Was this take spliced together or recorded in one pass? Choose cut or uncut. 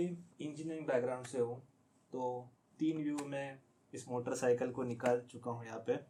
uncut